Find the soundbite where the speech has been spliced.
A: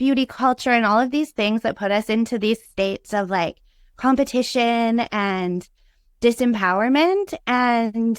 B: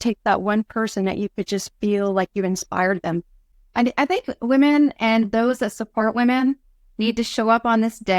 B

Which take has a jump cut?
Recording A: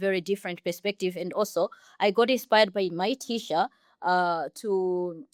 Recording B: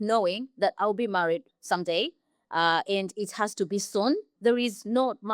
B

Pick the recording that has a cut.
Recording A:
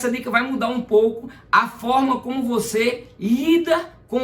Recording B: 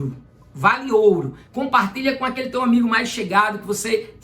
B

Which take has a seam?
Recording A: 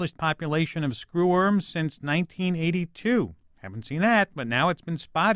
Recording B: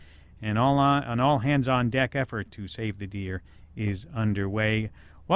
B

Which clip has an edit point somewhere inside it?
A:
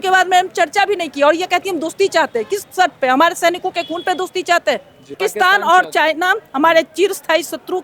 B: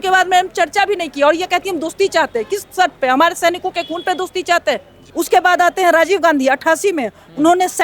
B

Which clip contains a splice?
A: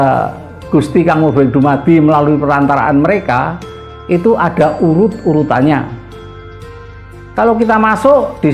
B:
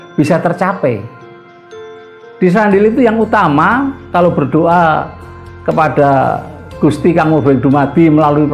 B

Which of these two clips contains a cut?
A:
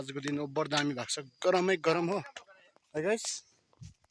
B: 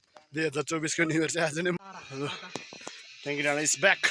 B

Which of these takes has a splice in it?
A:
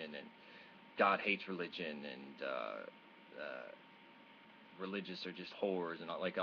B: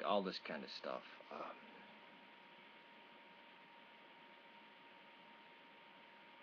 A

